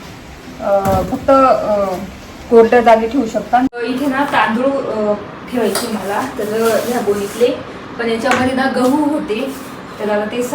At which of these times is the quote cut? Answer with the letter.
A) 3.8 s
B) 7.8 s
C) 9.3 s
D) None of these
A